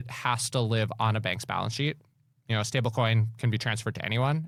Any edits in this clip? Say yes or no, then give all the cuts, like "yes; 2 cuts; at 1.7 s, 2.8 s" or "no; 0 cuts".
no; 0 cuts